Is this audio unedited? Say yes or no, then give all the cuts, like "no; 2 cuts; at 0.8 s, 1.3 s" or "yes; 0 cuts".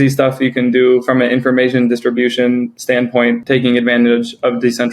no; 1 cut; at 3.4 s